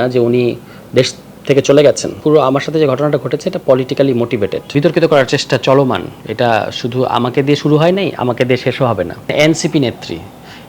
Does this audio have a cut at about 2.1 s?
yes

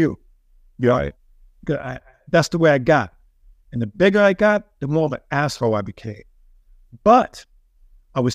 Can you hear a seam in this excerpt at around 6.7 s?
no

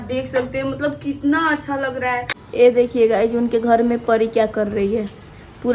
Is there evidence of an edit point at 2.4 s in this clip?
yes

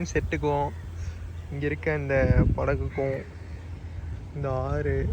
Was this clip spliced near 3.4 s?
no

